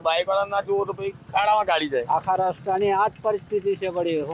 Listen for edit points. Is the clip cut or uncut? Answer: cut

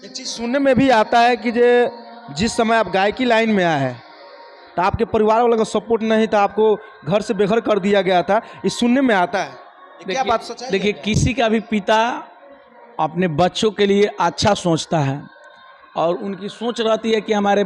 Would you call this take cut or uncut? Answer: uncut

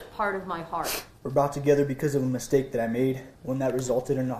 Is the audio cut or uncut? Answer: cut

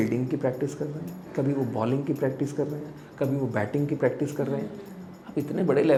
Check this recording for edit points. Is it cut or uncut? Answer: uncut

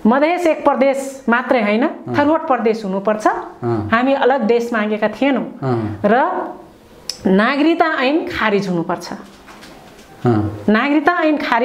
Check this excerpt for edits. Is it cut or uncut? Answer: uncut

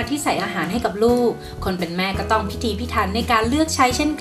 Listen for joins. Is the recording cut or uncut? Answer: uncut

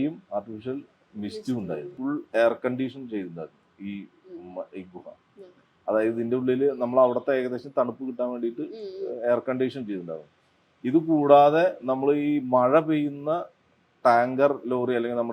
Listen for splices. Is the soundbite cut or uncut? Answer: cut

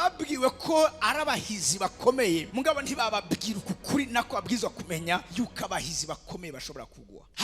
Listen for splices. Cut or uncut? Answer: uncut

